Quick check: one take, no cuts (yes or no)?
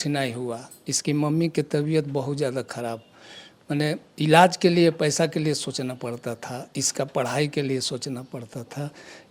yes